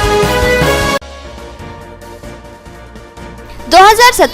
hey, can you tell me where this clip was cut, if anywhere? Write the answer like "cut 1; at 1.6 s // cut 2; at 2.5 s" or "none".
cut 1; at 0.9 s